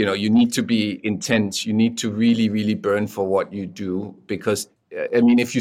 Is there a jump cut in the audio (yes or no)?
no